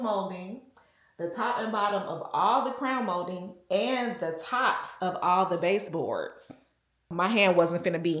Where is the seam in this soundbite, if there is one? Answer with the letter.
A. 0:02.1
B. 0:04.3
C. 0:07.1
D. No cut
C